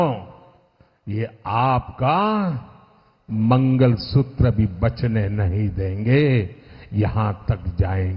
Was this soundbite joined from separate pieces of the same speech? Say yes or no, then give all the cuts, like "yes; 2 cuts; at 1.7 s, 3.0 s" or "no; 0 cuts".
no; 0 cuts